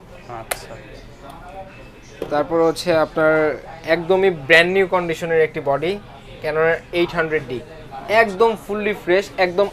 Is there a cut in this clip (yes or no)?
no